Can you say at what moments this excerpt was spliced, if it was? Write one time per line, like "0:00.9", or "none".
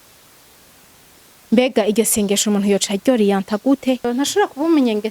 0:04.1

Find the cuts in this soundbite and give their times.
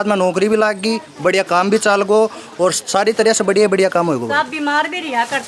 none

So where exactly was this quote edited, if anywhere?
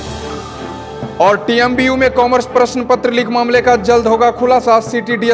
0:01.1

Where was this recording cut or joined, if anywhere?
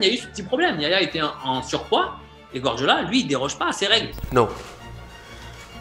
0:04.1

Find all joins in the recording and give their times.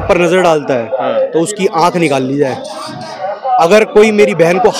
none

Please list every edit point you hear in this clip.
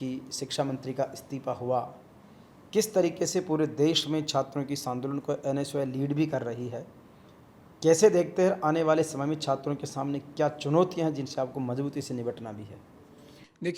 none

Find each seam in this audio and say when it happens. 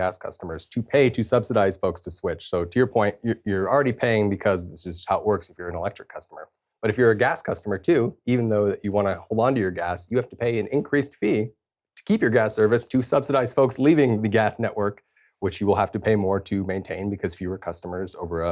none

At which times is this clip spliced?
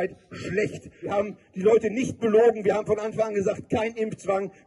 0:01.1

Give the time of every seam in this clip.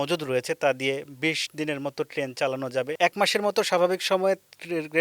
0:02.9

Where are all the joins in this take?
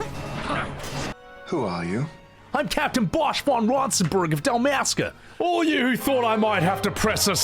0:01.1
0:05.3

